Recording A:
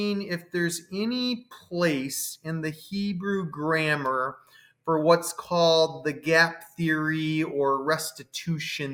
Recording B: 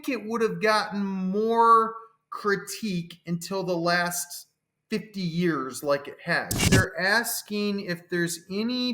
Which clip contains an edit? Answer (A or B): B